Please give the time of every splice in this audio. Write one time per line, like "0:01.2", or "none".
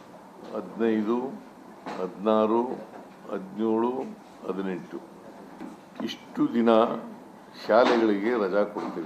0:05.5